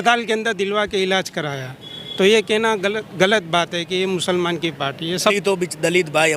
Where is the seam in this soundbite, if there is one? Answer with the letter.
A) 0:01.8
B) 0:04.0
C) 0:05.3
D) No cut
C